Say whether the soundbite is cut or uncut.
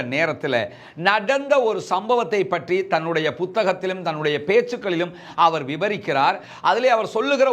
uncut